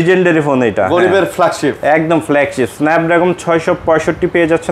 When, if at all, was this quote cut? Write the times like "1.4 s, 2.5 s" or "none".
none